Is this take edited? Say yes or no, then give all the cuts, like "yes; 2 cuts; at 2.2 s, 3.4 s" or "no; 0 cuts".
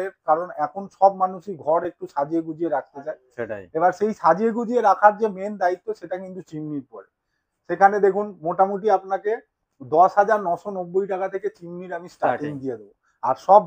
no; 0 cuts